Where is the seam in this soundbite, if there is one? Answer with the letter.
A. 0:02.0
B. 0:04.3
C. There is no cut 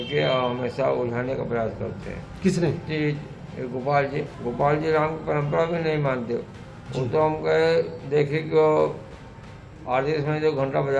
B